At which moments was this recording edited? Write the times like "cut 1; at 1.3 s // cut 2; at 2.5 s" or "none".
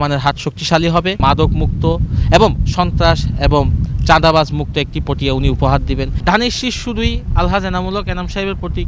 cut 1; at 1.2 s // cut 2; at 6.1 s